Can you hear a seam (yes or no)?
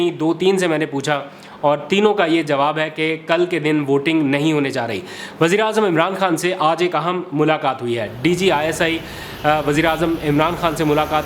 no